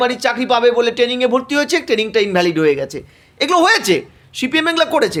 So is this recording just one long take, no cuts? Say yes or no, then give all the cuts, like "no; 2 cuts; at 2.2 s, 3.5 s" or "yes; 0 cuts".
yes; 0 cuts